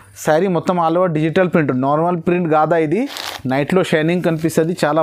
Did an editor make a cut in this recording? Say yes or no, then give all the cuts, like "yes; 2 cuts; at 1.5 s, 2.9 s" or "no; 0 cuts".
no; 0 cuts